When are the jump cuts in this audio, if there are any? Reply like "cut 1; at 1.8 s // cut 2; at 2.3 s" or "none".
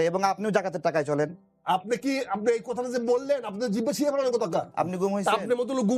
cut 1; at 1.5 s // cut 2; at 4.7 s